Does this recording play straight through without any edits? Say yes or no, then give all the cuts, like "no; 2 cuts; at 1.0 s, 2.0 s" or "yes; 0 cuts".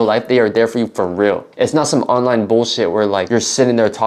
no; 2 cuts; at 1.5 s, 3.2 s